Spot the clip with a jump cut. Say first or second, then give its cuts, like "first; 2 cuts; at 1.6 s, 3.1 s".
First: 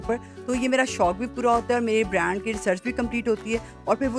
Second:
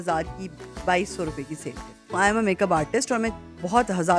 second; 1 cut; at 2.1 s